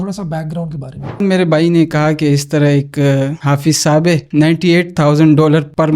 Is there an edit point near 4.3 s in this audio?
yes; 2 cuts; at 1.2 s, 4.3 s

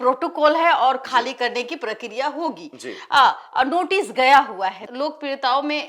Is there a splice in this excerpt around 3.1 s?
no; 1 cut; at 4.8 s

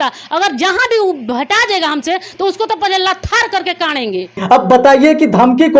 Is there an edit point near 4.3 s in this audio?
no; 0 cuts

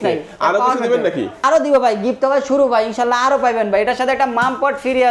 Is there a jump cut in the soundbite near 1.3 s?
yes; 1 cut; at 1.3 s

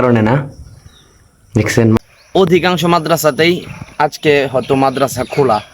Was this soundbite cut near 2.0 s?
yes; 1 cut; at 2.0 s

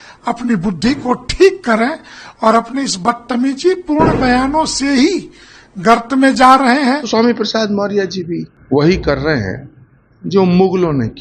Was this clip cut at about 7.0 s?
yes; 2 cuts; at 7.0 s, 8.5 s

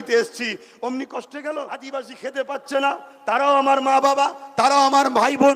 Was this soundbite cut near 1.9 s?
yes; 1 cut; at 1.9 s

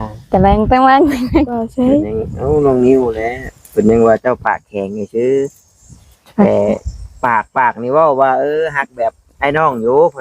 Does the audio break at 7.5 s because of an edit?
no; 1 cut; at 1.7 s

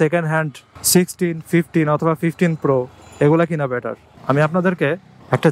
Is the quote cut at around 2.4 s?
no; 1 cut; at 4.1 s

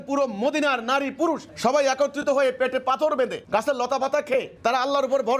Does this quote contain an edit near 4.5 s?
yes; 3 cuts; at 1.5 s, 3.4 s, 4.5 s

